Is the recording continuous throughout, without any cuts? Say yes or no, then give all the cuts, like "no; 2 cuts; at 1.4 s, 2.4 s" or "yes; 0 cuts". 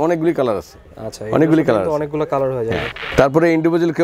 no; 1 cut; at 3.0 s